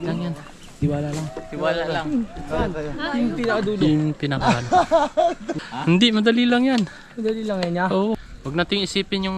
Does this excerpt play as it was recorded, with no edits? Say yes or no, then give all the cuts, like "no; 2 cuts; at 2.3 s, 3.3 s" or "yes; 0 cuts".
no; 2 cuts; at 5.5 s, 8.3 s